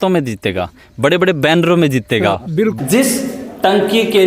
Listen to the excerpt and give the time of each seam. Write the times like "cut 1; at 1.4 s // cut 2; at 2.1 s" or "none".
cut 1; at 2.8 s

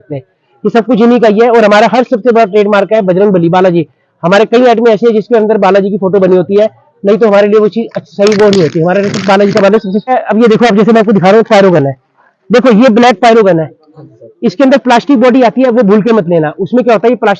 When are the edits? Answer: cut 1; at 10.1 s

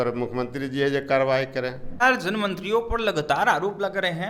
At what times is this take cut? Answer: cut 1; at 2.0 s

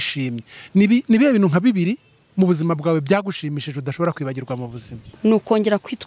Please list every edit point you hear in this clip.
cut 1; at 5.1 s

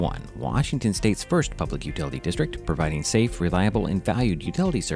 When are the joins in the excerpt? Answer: none

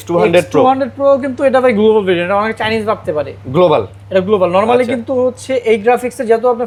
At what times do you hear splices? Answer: none

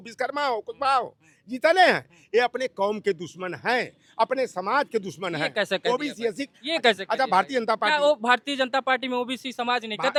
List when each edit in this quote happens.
none

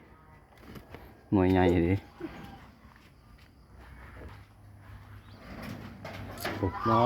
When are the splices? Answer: cut 1; at 4.3 s

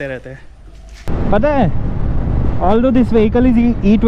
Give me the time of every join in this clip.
cut 1; at 1.1 s

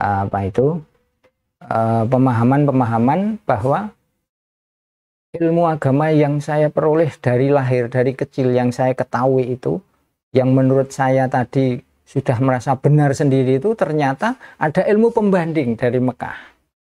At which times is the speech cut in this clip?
none

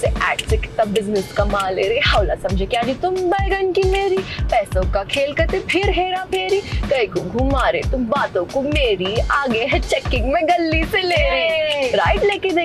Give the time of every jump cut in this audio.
none

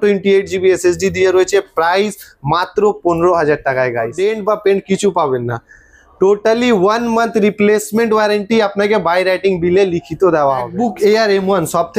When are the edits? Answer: cut 1; at 4.1 s // cut 2; at 10.7 s

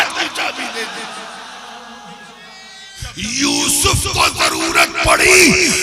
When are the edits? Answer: cut 1; at 3.0 s

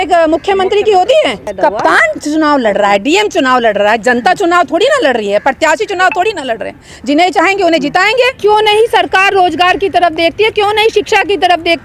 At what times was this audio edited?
cut 1; at 1.5 s // cut 2; at 8.4 s

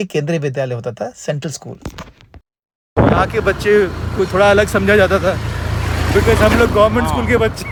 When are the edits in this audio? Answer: none

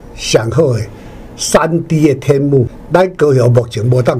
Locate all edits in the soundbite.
cut 1; at 2.8 s

